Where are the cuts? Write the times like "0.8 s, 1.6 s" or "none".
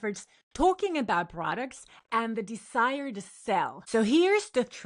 3.8 s